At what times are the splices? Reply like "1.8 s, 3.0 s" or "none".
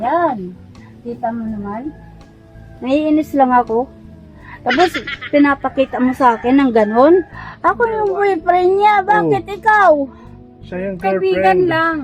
7.4 s